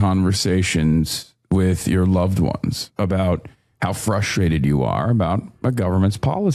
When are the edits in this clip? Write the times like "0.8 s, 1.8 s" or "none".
none